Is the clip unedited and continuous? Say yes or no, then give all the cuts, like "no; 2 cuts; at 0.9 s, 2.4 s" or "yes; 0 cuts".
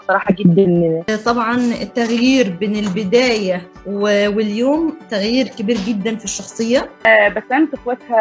no; 2 cuts; at 1.1 s, 7.1 s